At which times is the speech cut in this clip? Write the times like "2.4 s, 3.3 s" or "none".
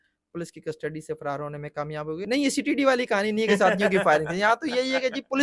2.2 s